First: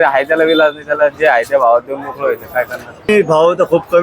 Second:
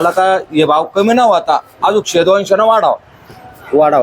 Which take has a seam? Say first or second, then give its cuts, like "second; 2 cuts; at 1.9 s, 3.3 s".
first; 1 cut; at 3.1 s